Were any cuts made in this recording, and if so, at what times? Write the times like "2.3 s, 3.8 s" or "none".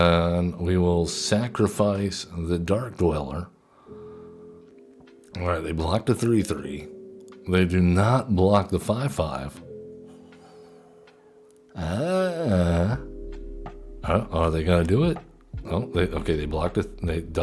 4.7 s

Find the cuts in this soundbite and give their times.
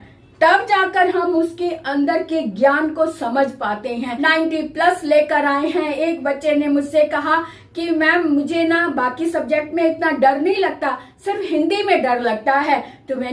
4.1 s

